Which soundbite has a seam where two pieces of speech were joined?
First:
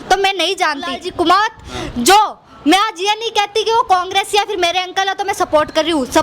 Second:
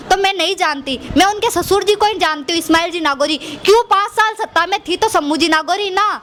first; 1 cut; at 1.0 s

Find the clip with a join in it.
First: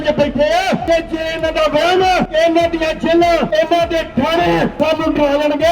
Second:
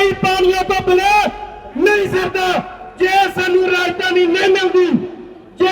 first; 4 cuts; at 0.8 s, 2.3 s, 3.5 s, 4.7 s

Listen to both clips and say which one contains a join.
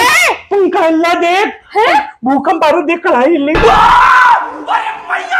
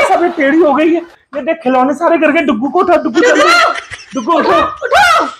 first; 1 cut; at 3.6 s

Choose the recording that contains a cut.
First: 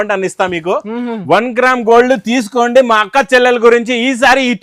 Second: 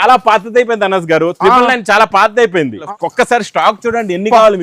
second; 1 cut; at 2.9 s

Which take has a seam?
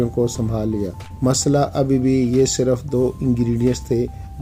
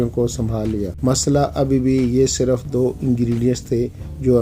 second; 1 cut; at 0.9 s

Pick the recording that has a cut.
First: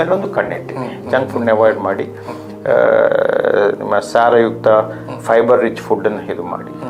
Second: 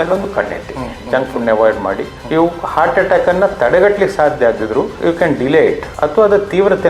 second; 3 cuts; at 2.1 s, 4.9 s, 5.9 s

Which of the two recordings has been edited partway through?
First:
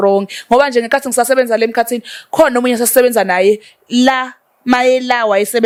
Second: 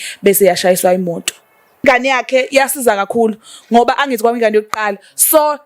second; 1 cut; at 1.7 s

